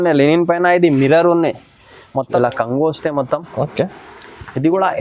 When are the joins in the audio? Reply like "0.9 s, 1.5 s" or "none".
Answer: 2.3 s